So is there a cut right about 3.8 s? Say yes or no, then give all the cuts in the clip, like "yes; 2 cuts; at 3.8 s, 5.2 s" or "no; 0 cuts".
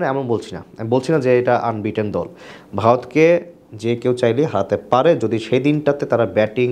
no; 0 cuts